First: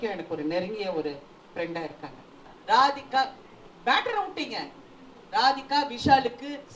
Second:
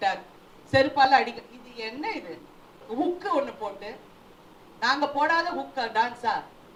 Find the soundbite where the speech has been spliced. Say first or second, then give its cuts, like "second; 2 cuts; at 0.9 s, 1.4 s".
first; 1 cut; at 2.5 s